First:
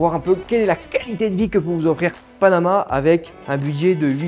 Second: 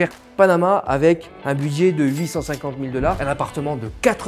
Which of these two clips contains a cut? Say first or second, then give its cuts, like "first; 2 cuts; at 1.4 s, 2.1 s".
second; 1 cut; at 3.2 s